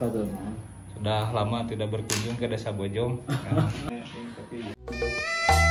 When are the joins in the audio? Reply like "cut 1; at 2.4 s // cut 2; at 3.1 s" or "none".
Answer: none